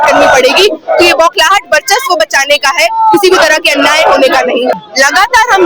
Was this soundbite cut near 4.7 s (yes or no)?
yes